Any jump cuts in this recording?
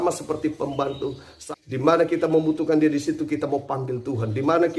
yes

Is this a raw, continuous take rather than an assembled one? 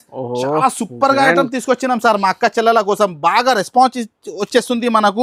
yes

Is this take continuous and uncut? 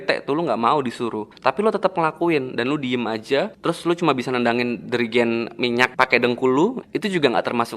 no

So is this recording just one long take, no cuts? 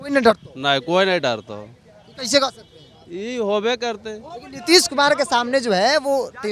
yes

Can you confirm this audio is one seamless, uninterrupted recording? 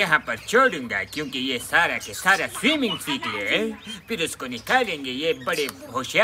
yes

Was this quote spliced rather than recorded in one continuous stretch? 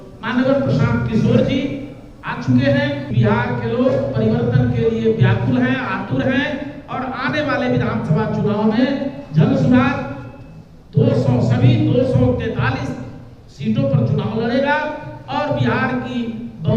yes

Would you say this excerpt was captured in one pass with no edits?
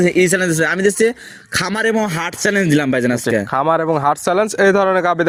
yes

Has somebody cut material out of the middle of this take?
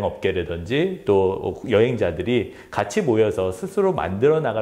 no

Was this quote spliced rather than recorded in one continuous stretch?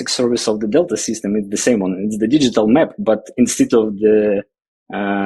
no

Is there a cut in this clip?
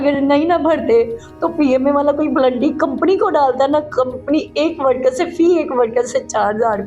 no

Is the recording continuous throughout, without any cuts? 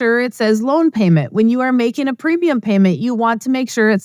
yes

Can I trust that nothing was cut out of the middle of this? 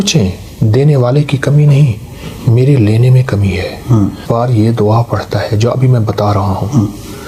no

